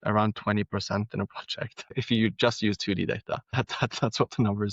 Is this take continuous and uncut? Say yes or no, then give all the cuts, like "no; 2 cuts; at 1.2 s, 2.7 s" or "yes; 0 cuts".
no; 2 cuts; at 1.9 s, 3.5 s